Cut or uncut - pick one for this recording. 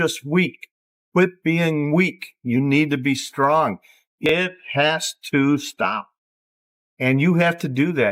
cut